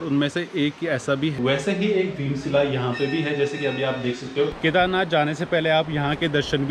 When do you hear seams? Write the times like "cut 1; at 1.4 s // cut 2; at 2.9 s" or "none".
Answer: cut 1; at 1.3 s // cut 2; at 4.6 s